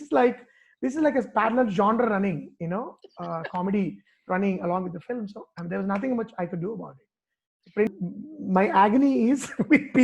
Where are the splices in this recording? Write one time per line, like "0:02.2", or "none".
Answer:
0:07.9